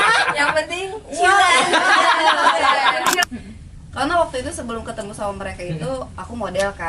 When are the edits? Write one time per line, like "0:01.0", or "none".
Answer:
0:03.3